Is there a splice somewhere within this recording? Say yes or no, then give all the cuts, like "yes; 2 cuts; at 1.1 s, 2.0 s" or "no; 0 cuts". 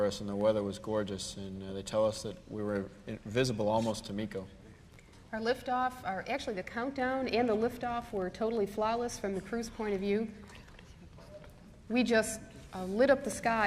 yes; 1 cut; at 1.0 s